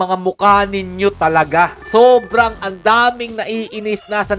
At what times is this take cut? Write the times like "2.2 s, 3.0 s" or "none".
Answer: 1.8 s